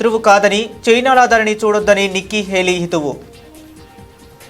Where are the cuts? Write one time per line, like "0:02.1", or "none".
0:03.3

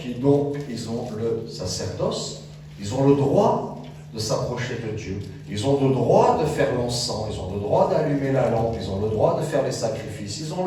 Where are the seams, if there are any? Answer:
none

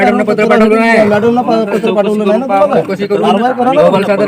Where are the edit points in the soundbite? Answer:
none

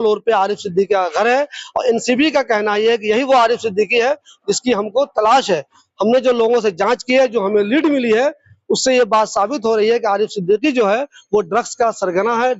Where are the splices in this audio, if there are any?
none

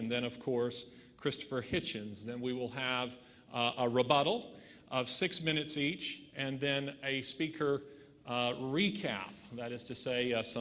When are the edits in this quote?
none

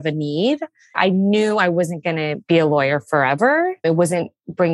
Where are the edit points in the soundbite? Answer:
0:01.0
0:02.4
0:03.8

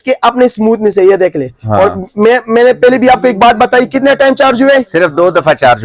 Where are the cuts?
none

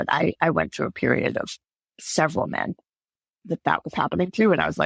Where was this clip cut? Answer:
none

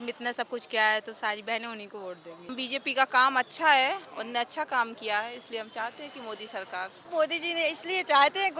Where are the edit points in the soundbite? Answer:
0:02.5
0:04.1
0:07.1

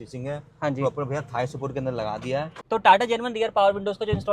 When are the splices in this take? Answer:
0:02.6

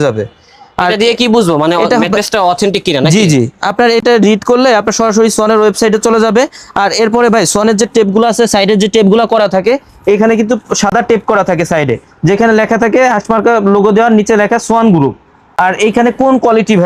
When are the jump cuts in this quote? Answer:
none

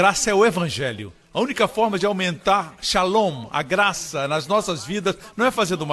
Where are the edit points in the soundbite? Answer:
0:01.3

